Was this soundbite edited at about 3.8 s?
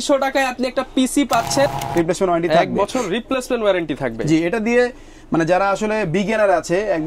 no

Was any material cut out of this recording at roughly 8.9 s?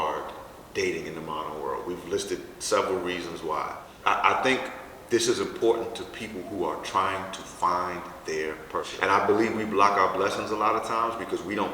yes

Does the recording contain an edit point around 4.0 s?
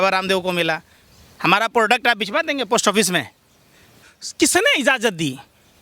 yes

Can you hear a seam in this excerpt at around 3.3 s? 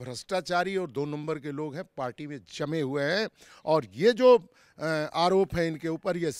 no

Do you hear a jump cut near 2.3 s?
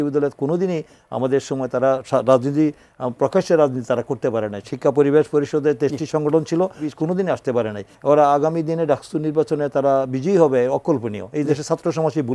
no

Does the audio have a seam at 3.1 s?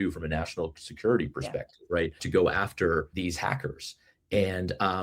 yes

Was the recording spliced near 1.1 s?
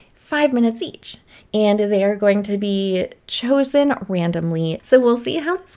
no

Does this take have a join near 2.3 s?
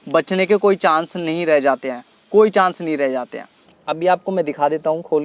no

